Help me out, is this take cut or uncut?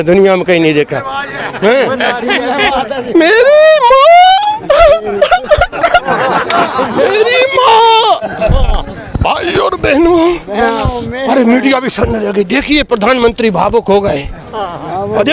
uncut